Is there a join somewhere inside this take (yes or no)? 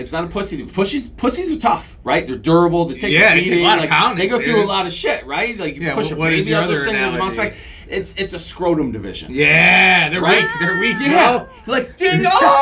no